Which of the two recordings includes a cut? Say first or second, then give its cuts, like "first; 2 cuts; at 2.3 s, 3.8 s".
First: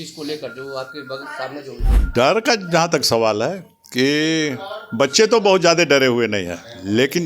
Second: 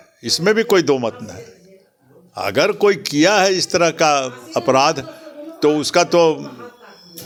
first; 1 cut; at 2.0 s